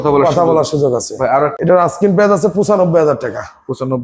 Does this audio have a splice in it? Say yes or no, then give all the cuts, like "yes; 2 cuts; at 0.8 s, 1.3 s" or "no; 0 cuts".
yes; 1 cut; at 1.5 s